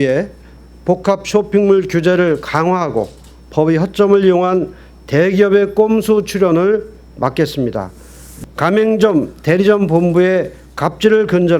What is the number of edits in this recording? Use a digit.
1